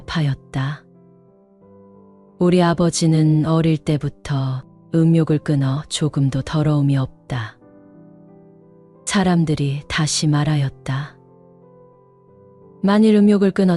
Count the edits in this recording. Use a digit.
2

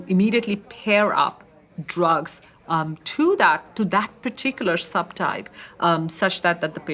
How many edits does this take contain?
0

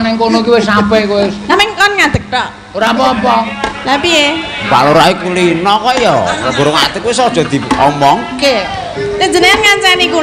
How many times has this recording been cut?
0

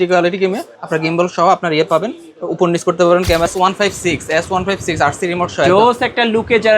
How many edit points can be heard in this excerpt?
1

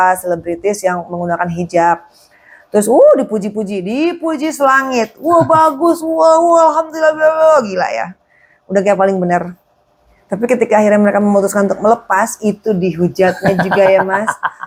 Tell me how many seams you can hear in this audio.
0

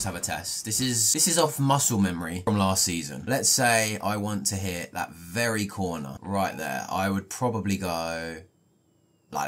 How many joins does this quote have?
1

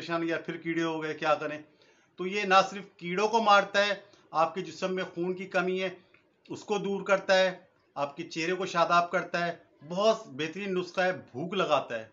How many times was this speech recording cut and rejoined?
0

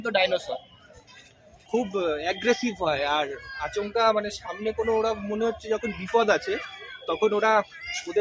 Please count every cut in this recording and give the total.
1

